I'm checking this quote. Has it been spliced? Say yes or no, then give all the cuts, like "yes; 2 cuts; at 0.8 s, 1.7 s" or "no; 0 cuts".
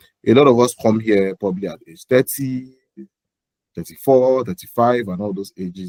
no; 0 cuts